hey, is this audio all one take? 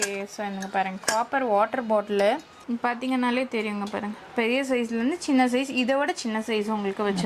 no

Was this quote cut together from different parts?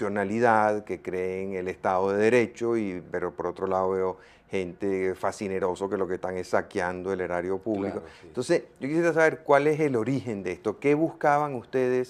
yes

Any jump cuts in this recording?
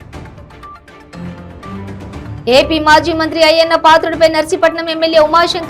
no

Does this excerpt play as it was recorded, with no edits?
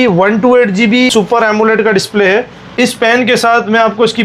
no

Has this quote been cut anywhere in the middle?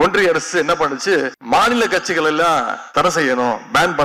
yes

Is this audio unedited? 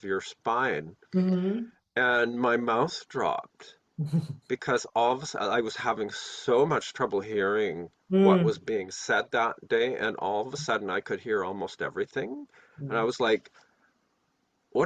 yes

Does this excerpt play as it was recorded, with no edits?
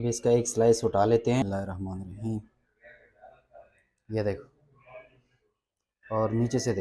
no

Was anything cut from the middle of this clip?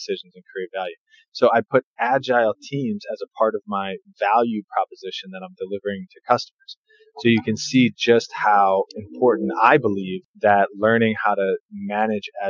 no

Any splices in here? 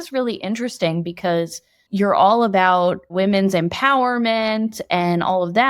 yes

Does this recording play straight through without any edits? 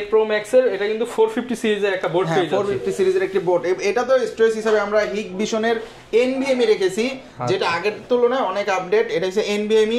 yes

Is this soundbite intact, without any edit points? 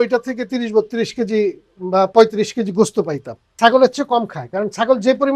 no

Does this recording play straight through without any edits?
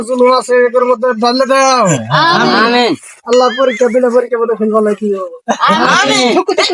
yes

